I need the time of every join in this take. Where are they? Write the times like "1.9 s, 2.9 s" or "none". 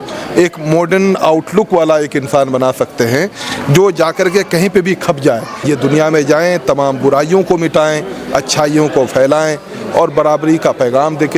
5.5 s